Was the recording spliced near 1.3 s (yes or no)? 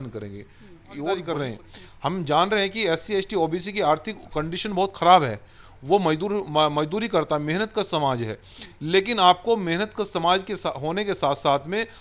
yes